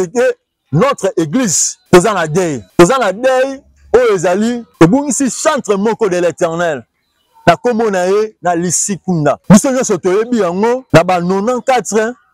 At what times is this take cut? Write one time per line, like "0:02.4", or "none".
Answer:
0:01.7
0:02.6
0:04.6
0:09.4
0:10.8